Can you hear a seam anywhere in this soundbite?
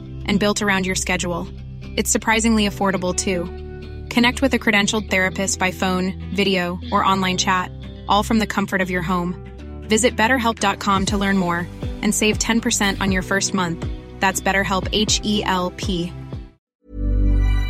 yes; 1 cut; at 16.8 s

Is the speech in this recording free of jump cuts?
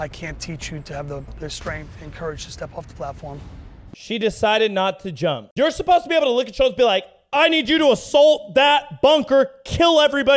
no; 1 cut; at 4.0 s

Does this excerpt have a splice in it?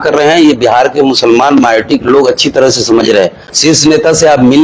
yes; 1 cut; at 3.5 s

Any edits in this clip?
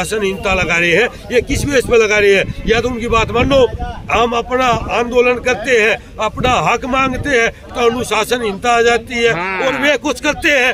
no; 0 cuts

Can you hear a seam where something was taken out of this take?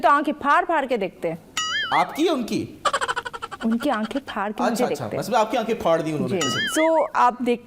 no; 0 cuts

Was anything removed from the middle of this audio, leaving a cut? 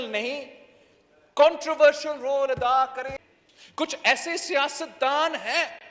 yes; 1 cut; at 3.1 s

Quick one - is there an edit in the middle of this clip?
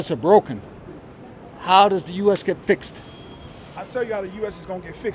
no; 0 cuts

